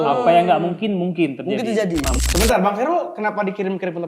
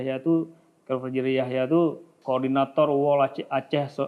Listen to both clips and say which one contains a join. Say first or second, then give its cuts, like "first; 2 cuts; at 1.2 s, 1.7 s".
first; 1 cut; at 2.2 s